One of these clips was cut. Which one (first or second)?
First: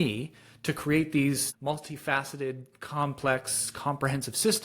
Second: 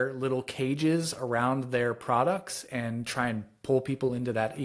first